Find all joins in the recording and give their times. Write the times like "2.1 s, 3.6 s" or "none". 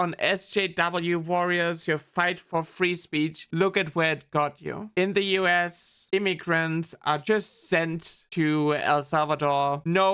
2.4 s, 3.4 s